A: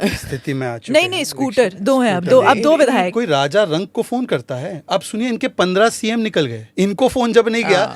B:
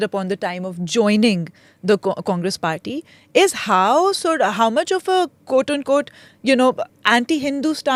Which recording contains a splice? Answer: A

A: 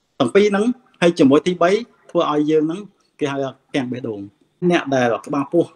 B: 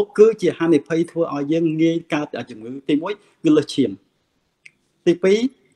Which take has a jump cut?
A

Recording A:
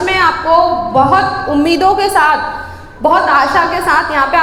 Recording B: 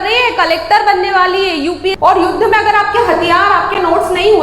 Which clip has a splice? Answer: B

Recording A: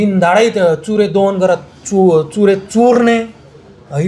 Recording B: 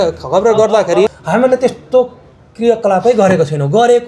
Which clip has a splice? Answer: B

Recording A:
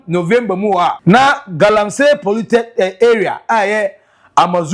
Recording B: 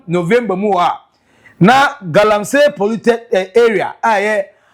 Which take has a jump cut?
A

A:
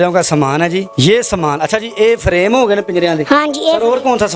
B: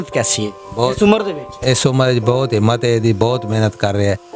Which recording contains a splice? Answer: A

